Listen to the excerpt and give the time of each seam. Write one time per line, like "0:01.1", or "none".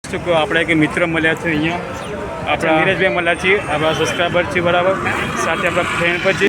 0:02.8